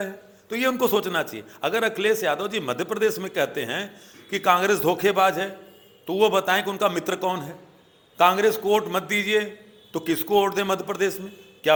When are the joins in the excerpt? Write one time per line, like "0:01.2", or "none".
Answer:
none